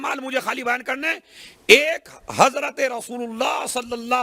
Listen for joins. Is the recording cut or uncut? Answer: uncut